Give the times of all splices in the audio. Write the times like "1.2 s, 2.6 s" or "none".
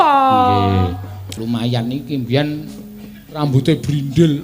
1.3 s